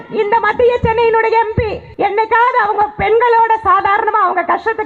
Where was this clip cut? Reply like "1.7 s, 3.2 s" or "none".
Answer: 1.8 s